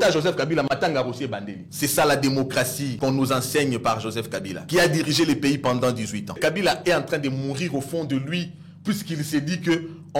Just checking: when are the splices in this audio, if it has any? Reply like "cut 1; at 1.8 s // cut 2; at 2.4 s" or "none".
cut 1; at 1.6 s // cut 2; at 2.8 s // cut 3; at 4.5 s // cut 4; at 6.3 s